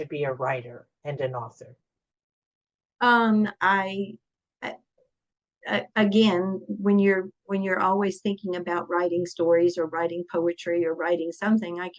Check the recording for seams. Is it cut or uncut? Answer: uncut